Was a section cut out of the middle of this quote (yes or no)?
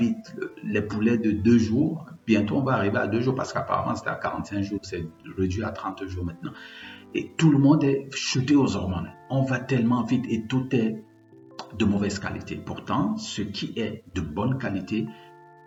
no